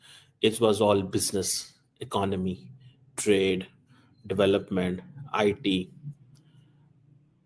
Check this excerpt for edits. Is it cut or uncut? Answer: uncut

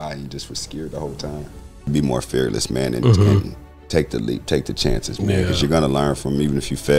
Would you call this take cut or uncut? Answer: cut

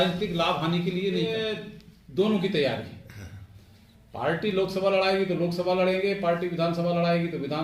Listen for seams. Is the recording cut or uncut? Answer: cut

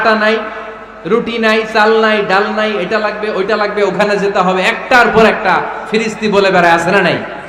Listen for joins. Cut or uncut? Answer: uncut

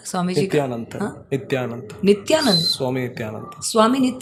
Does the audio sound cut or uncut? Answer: uncut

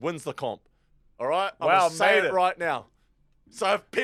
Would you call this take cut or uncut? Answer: uncut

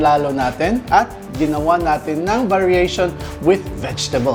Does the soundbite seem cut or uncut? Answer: uncut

